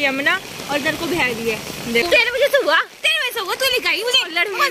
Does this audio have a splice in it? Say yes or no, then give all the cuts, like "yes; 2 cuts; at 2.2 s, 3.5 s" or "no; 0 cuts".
yes; 1 cut; at 2.0 s